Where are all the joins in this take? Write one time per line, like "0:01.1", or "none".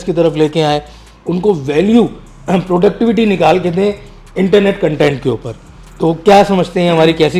none